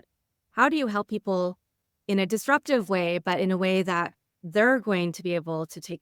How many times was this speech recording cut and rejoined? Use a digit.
0